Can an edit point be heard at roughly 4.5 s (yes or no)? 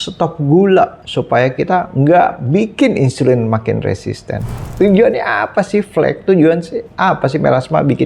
yes